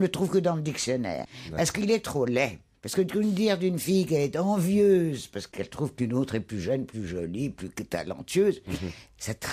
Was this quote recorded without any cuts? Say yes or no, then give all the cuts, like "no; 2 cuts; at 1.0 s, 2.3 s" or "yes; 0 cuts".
no; 1 cut; at 2.6 s